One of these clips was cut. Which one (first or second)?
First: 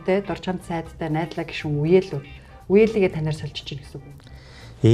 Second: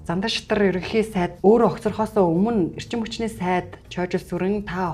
second